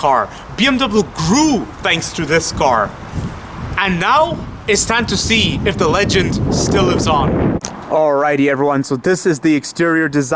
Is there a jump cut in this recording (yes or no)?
no